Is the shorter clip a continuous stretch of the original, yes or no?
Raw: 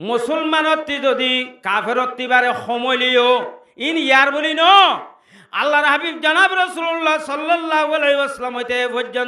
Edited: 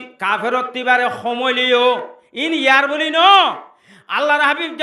yes